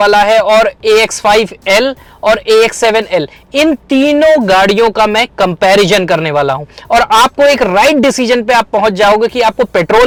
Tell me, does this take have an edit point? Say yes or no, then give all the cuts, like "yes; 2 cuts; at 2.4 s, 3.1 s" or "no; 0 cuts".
no; 0 cuts